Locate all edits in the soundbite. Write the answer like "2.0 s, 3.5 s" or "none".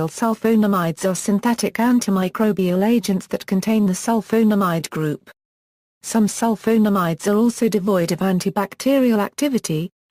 0.9 s